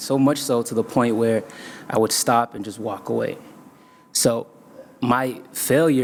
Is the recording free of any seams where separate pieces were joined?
yes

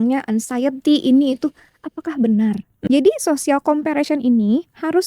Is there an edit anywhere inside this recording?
yes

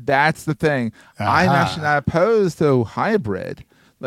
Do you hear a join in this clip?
no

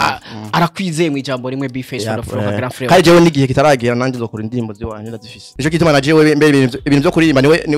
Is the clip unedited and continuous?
no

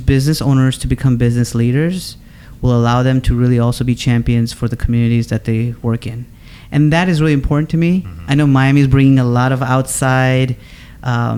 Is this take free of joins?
yes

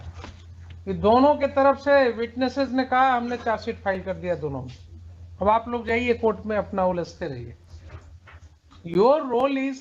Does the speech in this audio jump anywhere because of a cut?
no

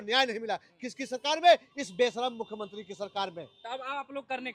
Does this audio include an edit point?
no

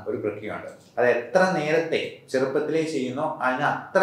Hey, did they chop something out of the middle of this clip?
no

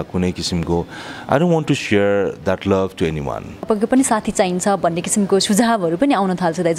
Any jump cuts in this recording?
yes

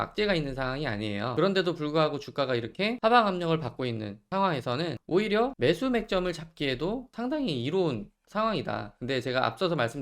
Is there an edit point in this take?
yes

